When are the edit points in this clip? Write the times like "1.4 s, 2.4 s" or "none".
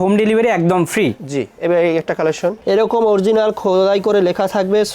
2.6 s

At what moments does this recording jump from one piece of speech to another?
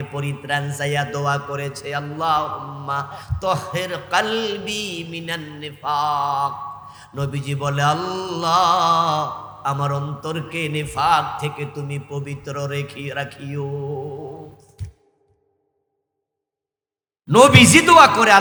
none

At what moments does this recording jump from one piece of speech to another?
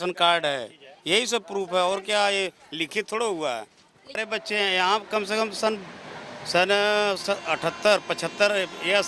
4.2 s

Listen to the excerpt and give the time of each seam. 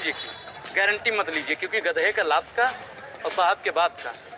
none

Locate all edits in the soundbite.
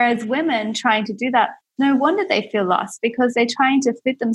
none

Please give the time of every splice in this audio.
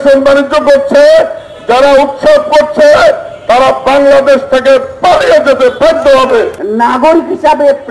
6.6 s

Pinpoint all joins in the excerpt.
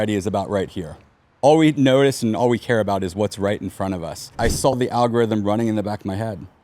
4.7 s

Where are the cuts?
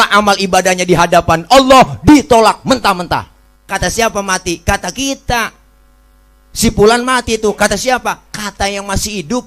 3.6 s

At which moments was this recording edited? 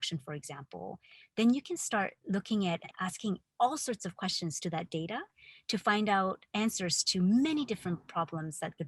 2.9 s, 8.1 s

